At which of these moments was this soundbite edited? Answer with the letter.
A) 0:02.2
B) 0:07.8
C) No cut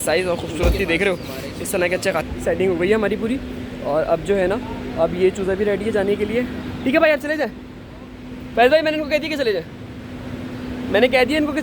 A